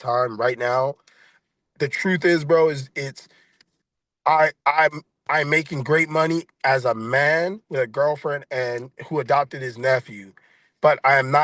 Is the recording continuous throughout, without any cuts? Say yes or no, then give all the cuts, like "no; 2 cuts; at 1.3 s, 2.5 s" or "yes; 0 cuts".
yes; 0 cuts